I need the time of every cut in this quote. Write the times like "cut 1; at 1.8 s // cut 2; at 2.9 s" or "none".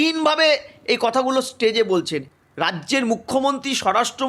cut 1; at 2.2 s

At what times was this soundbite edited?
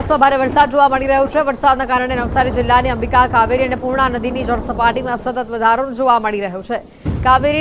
cut 1; at 6.0 s

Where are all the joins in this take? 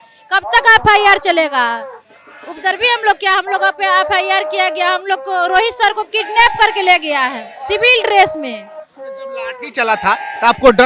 none

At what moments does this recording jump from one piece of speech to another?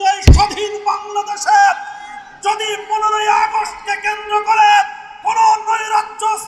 none

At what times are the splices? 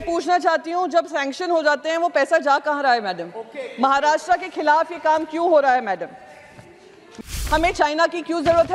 cut 1; at 7.3 s

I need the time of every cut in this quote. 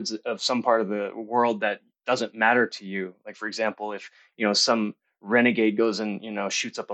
none

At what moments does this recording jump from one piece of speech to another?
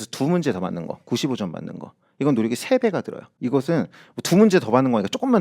cut 1; at 3.3 s

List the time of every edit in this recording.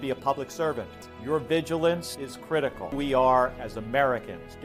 cut 1; at 0.9 s // cut 2; at 2.9 s

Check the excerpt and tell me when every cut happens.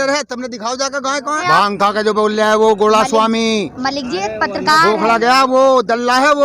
cut 1; at 1.4 s

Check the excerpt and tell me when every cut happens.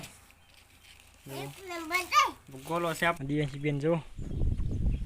cut 1; at 3.2 s

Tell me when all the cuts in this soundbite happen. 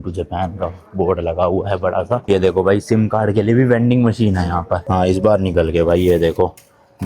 cut 1; at 2.2 s // cut 2; at 4.8 s

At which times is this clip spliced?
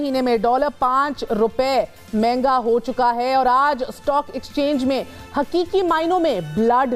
none

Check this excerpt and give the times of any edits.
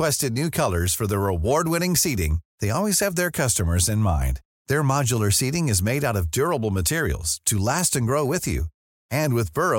none

